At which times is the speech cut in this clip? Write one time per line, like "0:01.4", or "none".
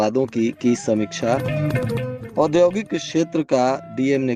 none